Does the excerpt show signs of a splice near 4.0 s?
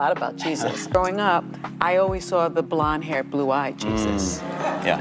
no; 1 cut; at 0.9 s

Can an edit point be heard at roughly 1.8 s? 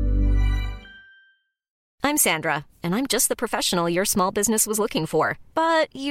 yes; 1 cut; at 1.8 s

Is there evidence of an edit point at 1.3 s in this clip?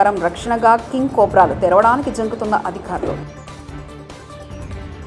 no; 0 cuts

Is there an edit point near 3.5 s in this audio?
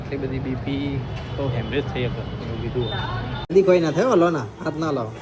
yes; 1 cut; at 3.5 s

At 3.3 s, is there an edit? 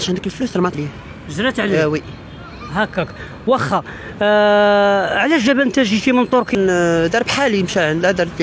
no; 2 cuts; at 0.7 s, 6.5 s

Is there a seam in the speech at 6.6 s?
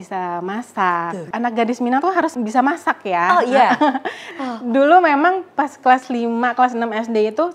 no; 3 cuts; at 1.3 s, 2.3 s, 4.3 s

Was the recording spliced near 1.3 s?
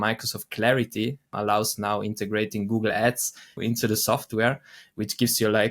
yes; 2 cuts; at 1.3 s, 3.6 s

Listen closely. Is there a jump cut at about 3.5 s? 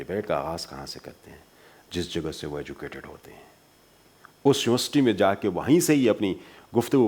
no; 0 cuts

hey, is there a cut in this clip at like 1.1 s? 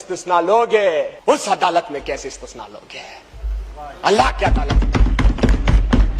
yes; 1 cut; at 1.1 s

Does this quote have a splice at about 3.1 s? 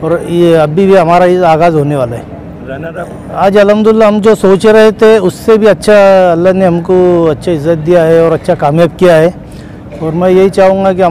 yes; 1 cut; at 3.1 s

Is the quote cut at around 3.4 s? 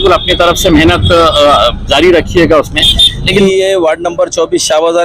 yes; 1 cut; at 3.4 s

